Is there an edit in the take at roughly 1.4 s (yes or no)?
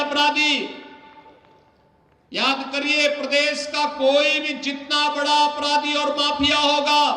no